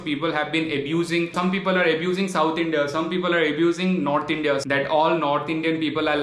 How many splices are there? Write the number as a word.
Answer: two